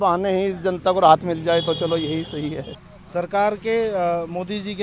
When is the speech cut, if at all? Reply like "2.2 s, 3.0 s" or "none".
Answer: none